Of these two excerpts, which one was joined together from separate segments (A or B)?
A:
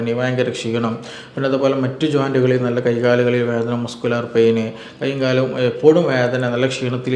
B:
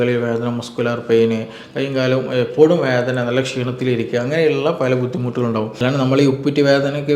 B